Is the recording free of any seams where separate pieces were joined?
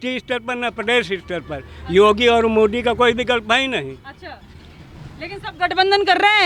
yes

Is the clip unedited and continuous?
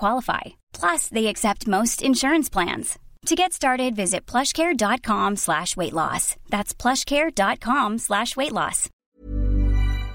no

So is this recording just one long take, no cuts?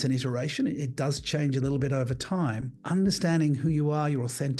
no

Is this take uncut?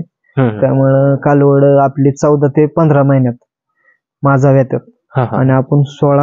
yes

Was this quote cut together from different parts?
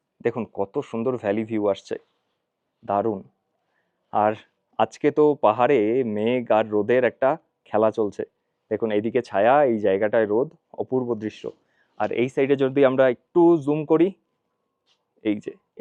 no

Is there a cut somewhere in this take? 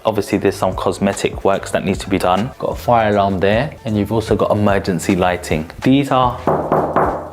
yes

